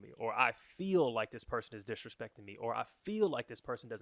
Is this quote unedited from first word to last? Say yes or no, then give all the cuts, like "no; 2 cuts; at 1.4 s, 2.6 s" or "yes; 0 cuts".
yes; 0 cuts